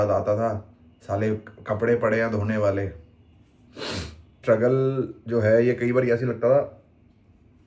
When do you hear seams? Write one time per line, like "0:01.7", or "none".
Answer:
0:04.4